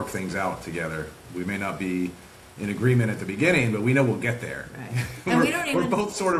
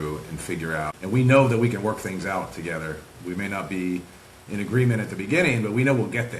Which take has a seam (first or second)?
second